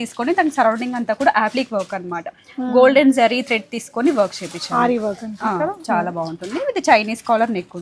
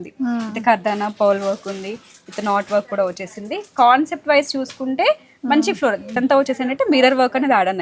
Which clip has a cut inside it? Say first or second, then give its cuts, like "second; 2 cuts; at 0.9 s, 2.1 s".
second; 1 cut; at 6.2 s